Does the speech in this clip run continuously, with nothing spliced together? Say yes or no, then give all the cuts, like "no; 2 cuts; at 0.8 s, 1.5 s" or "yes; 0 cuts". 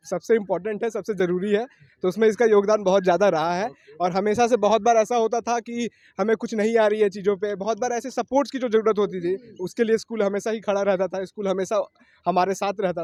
yes; 0 cuts